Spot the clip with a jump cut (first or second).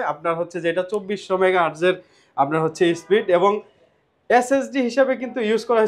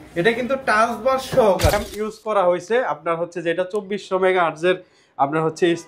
second